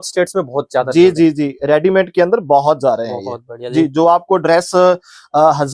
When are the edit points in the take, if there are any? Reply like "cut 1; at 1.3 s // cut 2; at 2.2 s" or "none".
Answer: none

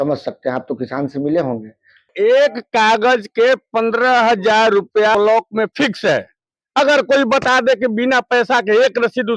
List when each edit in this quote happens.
cut 1; at 2.1 s // cut 2; at 5.1 s

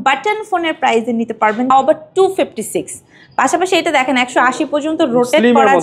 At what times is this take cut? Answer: cut 1; at 1.7 s

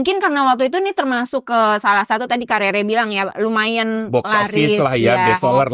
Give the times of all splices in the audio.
cut 1; at 1.4 s

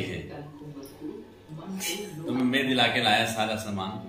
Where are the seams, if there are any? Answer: none

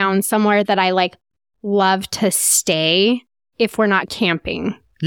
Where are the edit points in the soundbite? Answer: cut 1; at 3.4 s

